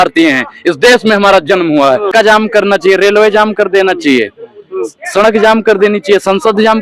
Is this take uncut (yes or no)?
no